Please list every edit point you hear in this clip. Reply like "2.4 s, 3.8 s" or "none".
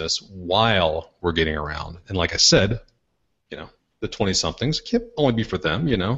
none